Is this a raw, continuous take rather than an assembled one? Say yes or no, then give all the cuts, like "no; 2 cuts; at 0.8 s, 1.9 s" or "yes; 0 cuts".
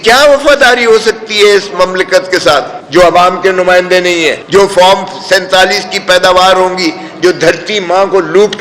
no; 2 cuts; at 2.8 s, 4.4 s